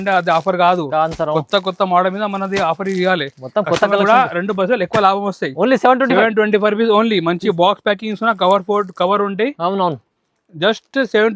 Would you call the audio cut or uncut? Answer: uncut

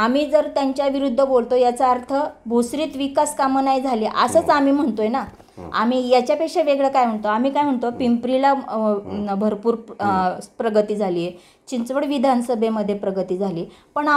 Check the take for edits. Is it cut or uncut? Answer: uncut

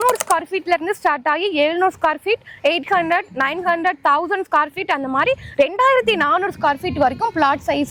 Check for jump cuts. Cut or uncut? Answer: uncut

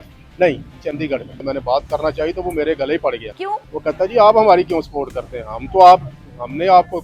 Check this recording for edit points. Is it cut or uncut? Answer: cut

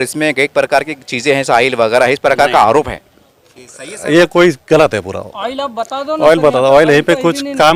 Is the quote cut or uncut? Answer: uncut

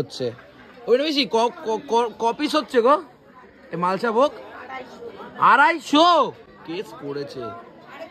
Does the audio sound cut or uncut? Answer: uncut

